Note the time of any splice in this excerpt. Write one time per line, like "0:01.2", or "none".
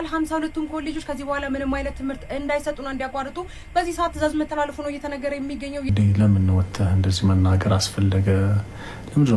0:05.9